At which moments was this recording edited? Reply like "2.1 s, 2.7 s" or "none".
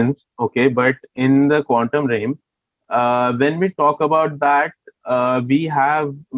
none